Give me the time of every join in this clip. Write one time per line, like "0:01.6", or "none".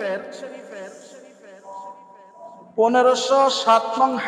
none

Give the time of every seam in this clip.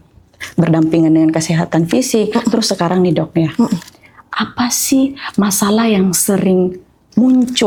none

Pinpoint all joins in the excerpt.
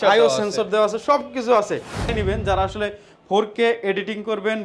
0:02.1

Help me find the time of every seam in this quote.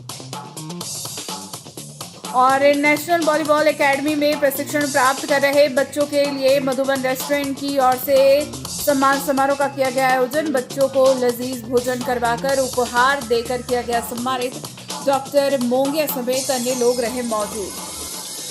0:01.6

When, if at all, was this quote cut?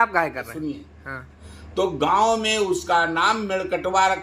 0:01.3

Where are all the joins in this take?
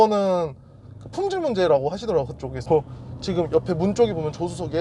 0:02.6

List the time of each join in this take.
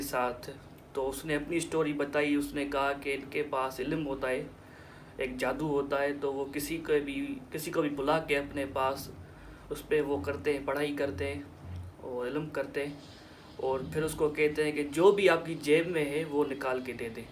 none

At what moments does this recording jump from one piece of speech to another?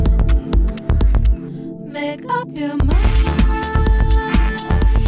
none

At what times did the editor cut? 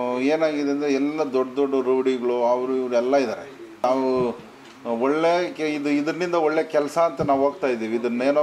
0:03.8

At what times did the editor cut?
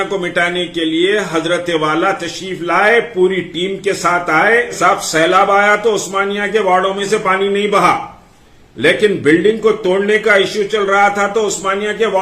0:04.8

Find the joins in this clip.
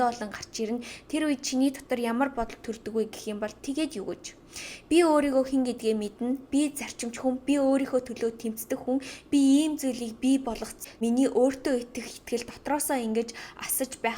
0:10.9

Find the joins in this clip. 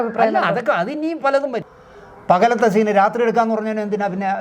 0:01.7

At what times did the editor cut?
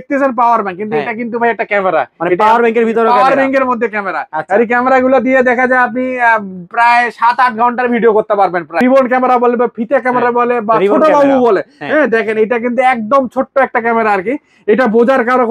0:08.8

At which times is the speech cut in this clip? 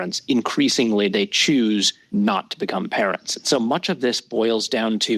0:02.0

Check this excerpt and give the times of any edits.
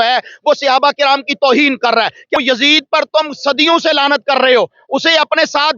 0:02.4

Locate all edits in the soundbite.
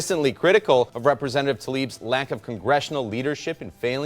0:00.9

